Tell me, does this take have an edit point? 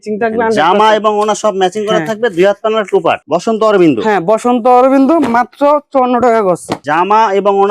yes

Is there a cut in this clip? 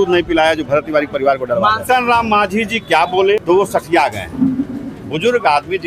yes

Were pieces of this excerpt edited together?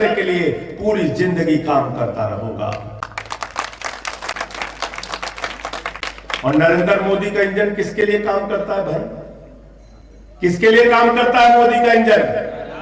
yes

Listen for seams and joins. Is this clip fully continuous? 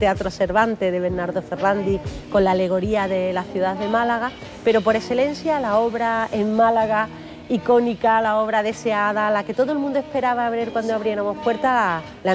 yes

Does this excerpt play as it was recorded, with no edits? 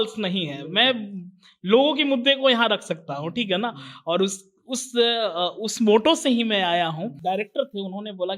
no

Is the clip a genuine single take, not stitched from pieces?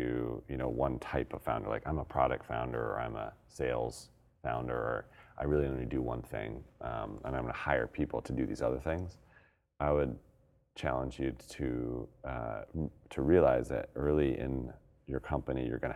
yes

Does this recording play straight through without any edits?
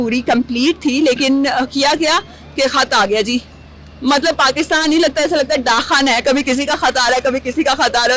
yes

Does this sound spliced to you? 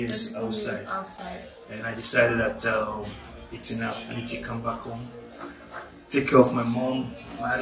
no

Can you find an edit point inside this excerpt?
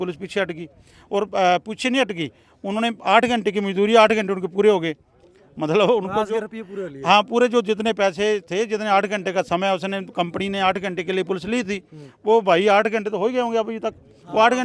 no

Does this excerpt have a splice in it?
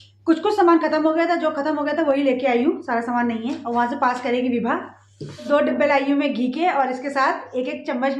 yes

